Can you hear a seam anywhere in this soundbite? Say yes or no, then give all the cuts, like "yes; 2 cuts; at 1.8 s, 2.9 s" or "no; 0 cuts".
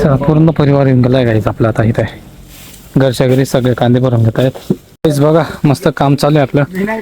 yes; 1 cut; at 4.9 s